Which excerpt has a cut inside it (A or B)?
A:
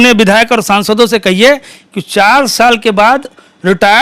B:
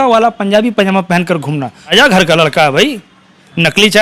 B